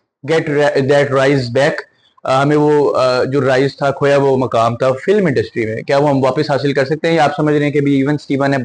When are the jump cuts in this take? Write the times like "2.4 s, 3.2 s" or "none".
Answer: none